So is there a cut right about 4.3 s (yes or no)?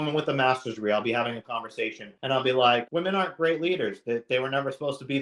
no